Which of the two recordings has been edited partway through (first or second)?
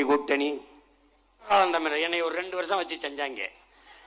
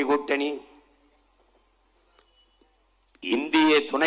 first